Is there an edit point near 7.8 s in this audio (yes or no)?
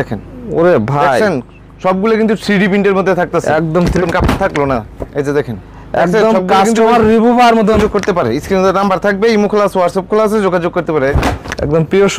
yes